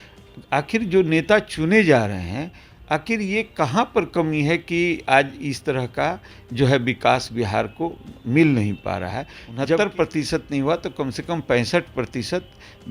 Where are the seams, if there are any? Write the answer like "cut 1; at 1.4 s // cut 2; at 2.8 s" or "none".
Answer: cut 1; at 9.6 s